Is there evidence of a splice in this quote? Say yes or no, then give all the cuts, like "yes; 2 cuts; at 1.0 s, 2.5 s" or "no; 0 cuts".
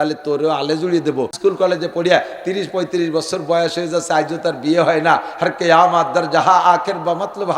yes; 1 cut; at 1.3 s